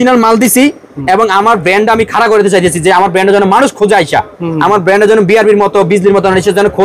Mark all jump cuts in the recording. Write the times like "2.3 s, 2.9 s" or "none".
none